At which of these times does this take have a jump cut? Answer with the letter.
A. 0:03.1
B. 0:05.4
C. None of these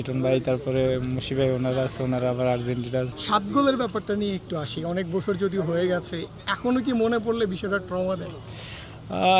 A